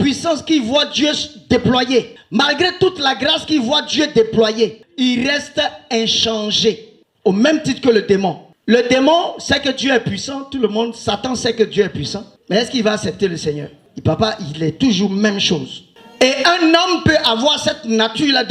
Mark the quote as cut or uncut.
uncut